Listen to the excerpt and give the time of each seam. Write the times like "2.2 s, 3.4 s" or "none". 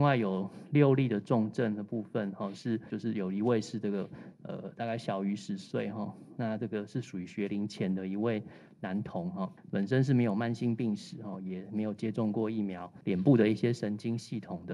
2.9 s, 9.6 s, 12.9 s